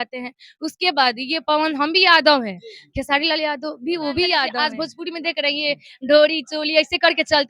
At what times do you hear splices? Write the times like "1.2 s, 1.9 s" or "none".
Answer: 4.5 s